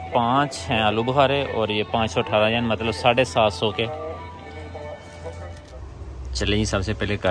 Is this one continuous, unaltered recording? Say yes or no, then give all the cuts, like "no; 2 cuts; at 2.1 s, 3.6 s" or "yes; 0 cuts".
no; 1 cut; at 5.6 s